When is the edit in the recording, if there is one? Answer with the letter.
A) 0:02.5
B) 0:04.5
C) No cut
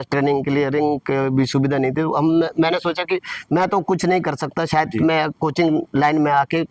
C